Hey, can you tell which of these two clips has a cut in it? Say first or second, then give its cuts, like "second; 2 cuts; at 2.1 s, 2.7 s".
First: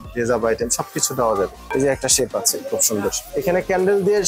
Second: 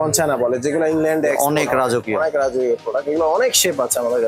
first; 2 cuts; at 1.7 s, 3.2 s